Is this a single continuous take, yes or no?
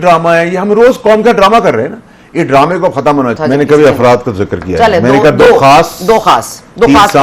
no